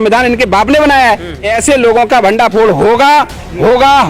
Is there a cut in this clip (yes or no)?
yes